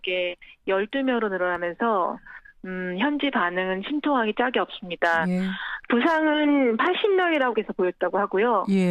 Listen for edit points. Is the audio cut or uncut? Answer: uncut